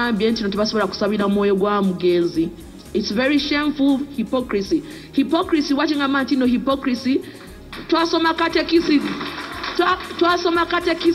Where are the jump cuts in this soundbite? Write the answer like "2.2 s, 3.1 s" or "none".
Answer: none